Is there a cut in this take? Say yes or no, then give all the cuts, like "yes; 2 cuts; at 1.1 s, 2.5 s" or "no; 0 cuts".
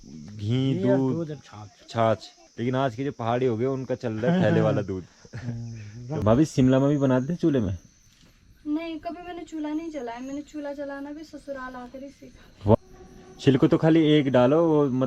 yes; 3 cuts; at 2.4 s, 6.2 s, 12.8 s